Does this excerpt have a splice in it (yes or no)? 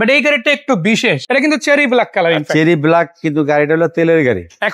yes